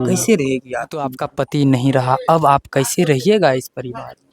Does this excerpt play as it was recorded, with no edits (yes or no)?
no